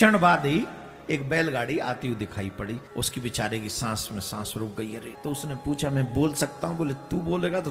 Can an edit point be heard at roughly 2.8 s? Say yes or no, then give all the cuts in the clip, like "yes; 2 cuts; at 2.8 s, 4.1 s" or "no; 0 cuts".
yes; 2 cuts; at 2.8 s, 5.1 s